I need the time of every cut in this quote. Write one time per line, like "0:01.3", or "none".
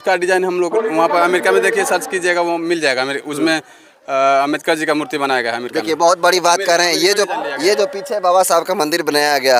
none